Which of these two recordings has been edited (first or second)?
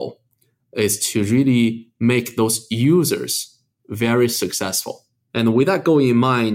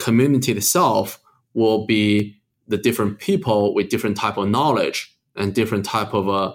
first